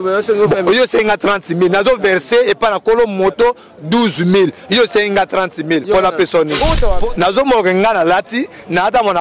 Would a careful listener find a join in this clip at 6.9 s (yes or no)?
yes